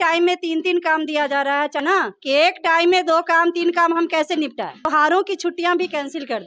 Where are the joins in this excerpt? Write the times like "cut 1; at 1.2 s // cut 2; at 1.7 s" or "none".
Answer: cut 1; at 1.8 s // cut 2; at 4.9 s